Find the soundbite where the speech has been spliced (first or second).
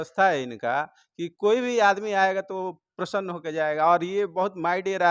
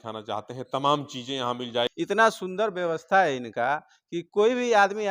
second